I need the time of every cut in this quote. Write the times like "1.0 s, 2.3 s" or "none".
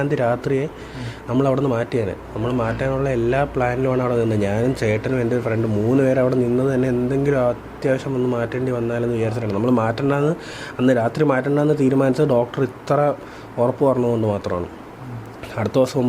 none